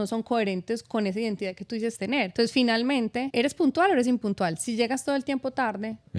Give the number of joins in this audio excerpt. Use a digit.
2